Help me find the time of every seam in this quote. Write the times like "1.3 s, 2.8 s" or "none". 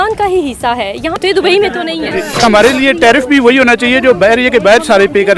1.2 s, 2.4 s